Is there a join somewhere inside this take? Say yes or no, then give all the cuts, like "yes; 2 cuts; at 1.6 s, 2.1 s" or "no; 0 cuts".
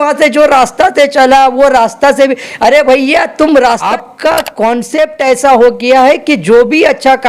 yes; 1 cut; at 3.8 s